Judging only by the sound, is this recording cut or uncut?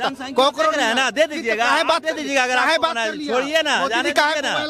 uncut